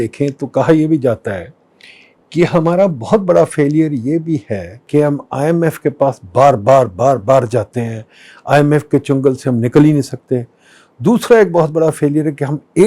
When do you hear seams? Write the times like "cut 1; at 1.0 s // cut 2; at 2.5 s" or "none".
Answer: cut 1; at 4.9 s